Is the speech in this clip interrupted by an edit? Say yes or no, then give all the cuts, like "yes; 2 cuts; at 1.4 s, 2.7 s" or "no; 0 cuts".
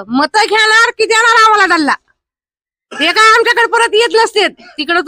no; 0 cuts